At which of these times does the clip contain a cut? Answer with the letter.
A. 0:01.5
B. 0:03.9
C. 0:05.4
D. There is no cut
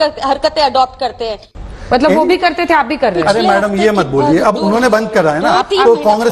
A